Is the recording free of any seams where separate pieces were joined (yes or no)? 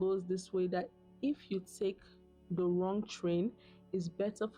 yes